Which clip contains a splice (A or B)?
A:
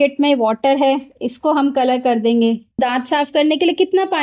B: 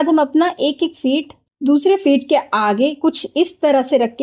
A